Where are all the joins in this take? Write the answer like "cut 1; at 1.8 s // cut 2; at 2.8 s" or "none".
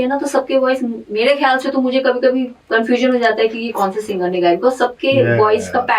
cut 1; at 2.6 s